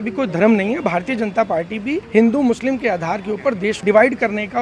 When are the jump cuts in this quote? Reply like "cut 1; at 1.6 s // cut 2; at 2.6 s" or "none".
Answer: cut 1; at 2.0 s // cut 2; at 3.8 s